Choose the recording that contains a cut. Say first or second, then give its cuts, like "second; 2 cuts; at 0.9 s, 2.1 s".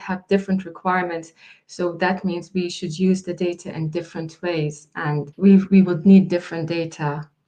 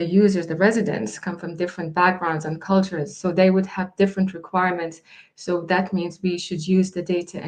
first; 1 cut; at 5.3 s